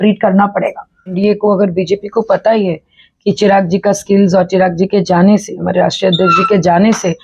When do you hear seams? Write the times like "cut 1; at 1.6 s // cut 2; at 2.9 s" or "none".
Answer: cut 1; at 1.1 s